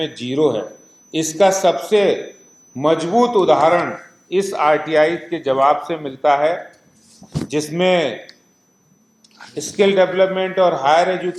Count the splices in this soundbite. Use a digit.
0